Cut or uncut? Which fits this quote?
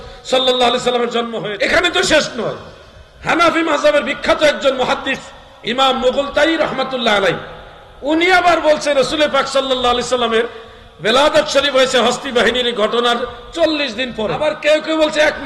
cut